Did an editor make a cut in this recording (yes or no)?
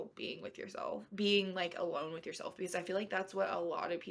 no